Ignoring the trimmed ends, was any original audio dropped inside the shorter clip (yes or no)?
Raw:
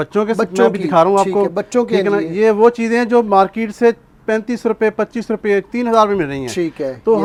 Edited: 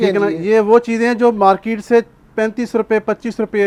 no